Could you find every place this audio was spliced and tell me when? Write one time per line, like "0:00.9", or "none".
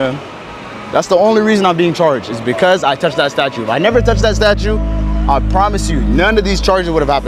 none

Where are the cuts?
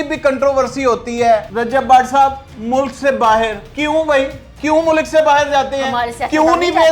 0:01.5
0:03.6
0:04.4

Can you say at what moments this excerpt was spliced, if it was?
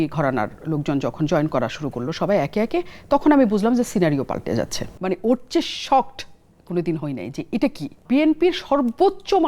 0:04.9
0:08.0

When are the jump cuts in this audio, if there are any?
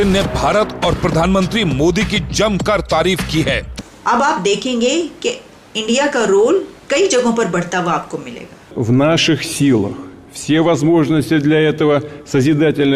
0:03.7
0:08.6

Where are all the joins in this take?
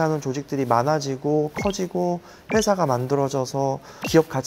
none

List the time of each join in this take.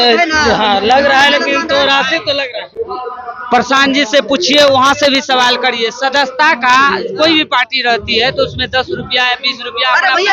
none

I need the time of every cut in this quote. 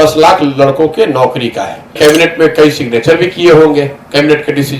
0:02.0

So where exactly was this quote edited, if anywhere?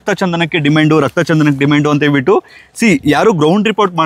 none

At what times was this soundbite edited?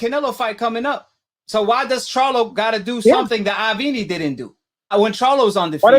0:04.9

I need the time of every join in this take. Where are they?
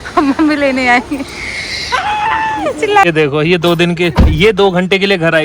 0:03.0

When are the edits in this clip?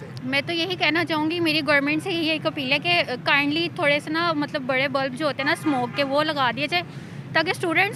none

